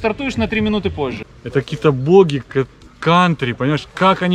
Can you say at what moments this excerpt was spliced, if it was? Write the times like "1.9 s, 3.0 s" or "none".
1.2 s